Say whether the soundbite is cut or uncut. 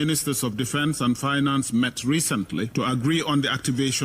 cut